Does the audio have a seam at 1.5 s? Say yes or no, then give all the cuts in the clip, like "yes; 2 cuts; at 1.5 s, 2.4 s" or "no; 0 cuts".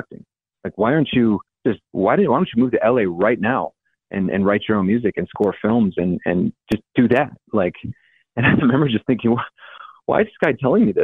yes; 1 cut; at 1.5 s